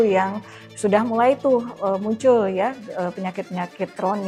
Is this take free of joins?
yes; 0 cuts

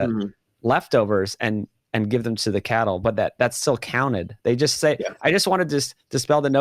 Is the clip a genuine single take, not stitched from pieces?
yes; 0 cuts

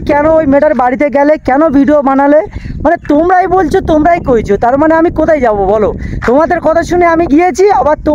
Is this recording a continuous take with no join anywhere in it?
yes; 0 cuts

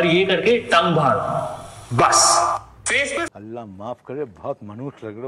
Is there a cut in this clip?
yes; 1 cut; at 3.3 s

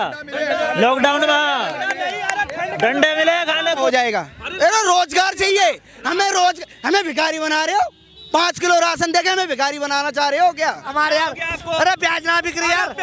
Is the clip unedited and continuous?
no; 2 cuts; at 3.8 s, 11.0 s

